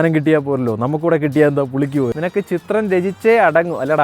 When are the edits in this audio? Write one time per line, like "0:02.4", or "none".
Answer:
0:02.1